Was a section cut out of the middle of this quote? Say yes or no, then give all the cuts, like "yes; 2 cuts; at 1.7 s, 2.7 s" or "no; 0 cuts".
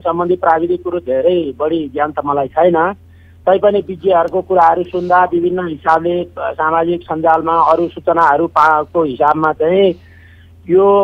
no; 0 cuts